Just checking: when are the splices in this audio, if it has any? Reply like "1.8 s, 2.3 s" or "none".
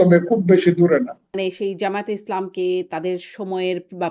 1.3 s